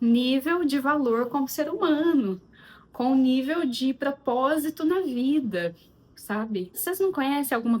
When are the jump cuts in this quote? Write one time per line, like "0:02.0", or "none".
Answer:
0:06.8